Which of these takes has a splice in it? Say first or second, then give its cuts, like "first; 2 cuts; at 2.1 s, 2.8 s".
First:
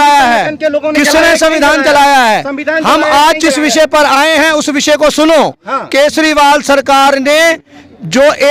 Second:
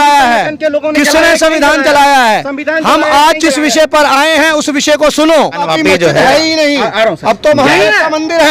second; 1 cut; at 5.6 s